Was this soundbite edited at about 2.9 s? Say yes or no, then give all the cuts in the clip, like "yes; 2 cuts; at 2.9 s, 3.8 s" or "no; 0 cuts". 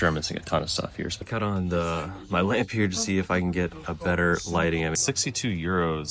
no; 2 cuts; at 1.2 s, 5.0 s